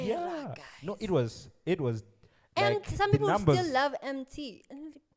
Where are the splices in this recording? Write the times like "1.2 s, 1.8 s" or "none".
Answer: none